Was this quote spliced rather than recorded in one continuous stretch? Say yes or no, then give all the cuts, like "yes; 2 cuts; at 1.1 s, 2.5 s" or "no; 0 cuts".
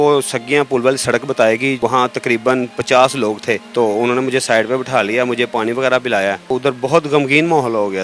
no; 0 cuts